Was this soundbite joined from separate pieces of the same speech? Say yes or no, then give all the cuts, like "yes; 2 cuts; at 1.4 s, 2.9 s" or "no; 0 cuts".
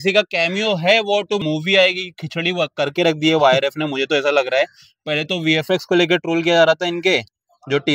yes; 1 cut; at 1.4 s